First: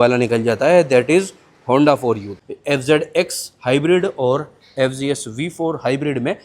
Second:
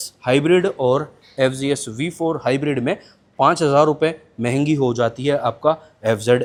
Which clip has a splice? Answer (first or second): first